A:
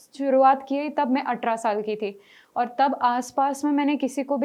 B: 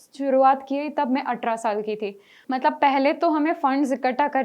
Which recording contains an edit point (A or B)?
B